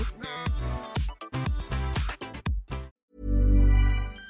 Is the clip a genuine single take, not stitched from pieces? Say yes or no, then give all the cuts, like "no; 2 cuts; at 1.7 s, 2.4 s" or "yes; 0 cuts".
no; 1 cut; at 3.0 s